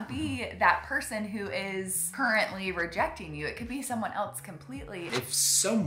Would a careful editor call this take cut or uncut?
cut